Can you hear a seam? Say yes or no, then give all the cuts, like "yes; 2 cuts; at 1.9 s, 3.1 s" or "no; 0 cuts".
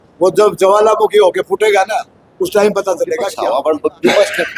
yes; 1 cut; at 3.3 s